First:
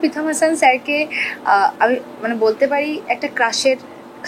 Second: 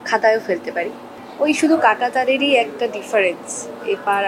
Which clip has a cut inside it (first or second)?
second